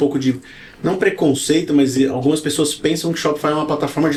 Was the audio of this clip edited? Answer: no; 0 cuts

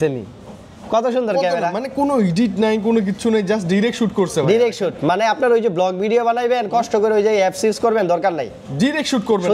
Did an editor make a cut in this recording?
no; 0 cuts

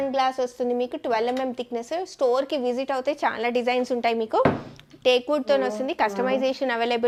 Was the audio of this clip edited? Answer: no; 0 cuts

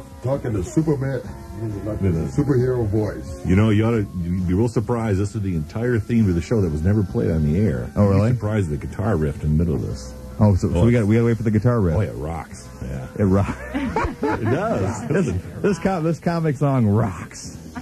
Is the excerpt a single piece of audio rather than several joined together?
no; 1 cut; at 4.2 s

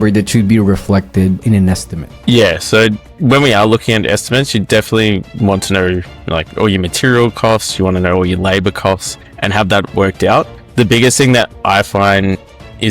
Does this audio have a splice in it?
yes; 1 cut; at 1.4 s

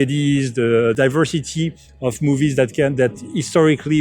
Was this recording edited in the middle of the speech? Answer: yes; 1 cut; at 1.0 s

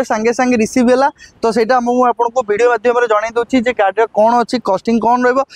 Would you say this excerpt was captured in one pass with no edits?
yes; 0 cuts

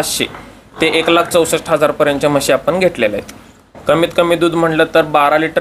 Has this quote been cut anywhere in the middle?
no; 0 cuts

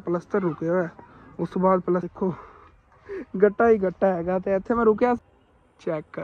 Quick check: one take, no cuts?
no; 2 cuts; at 2.1 s, 5.2 s

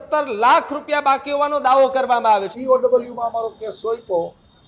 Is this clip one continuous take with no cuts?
no; 1 cut; at 2.5 s

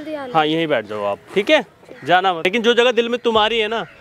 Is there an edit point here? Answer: yes; 1 cut; at 2.4 s

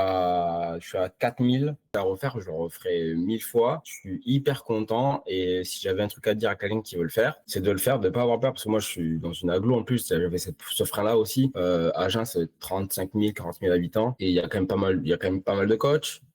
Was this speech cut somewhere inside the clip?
yes; 1 cut; at 1.8 s

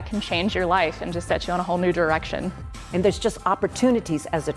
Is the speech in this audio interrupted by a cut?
yes; 1 cut; at 2.7 s

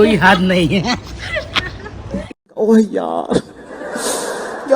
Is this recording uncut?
no; 1 cut; at 2.3 s

